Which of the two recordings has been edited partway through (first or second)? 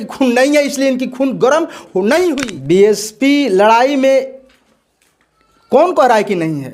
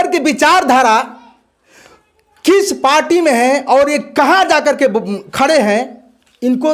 first